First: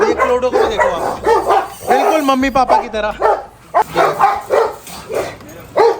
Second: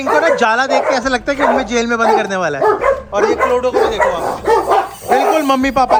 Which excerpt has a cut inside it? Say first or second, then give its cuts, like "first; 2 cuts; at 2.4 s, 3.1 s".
first; 1 cut; at 3.8 s